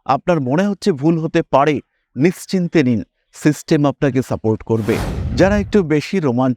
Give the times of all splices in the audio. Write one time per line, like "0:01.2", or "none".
0:05.2